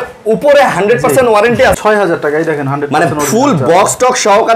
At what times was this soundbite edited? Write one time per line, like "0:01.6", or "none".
0:01.8